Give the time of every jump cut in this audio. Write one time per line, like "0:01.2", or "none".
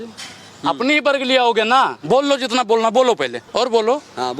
0:03.4